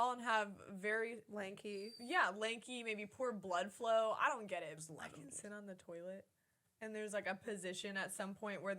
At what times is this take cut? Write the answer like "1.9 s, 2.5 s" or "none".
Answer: 4.8 s